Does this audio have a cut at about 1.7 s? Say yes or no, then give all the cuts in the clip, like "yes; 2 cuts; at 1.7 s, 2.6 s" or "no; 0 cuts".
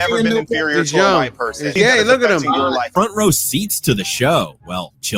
yes; 2 cuts; at 1.7 s, 2.9 s